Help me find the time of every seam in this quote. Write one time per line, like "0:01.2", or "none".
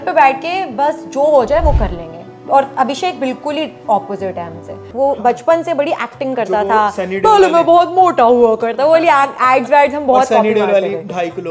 0:04.8

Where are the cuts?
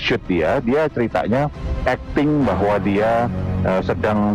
none

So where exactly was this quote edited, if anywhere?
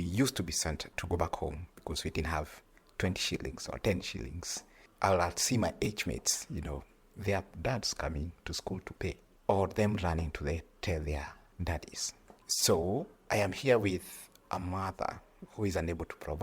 0:00.9

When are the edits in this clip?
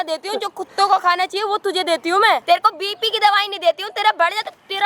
0:02.4

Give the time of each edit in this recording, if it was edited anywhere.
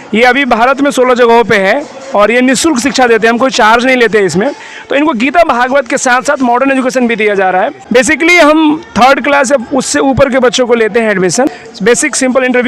0:04.7
0:07.8
0:11.6

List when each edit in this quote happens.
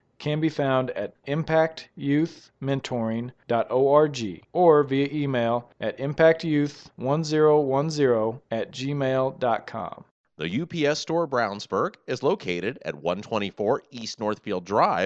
0:10.1

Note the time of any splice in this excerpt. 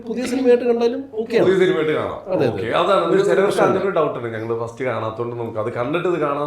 none

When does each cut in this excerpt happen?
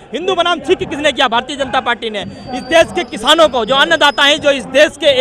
none

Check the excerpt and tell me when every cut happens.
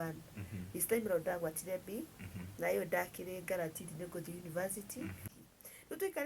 0:05.2

